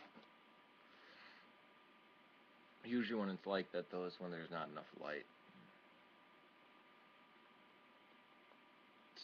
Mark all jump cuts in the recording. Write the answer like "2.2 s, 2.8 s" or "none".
3.0 s